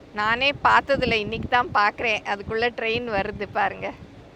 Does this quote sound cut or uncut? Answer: uncut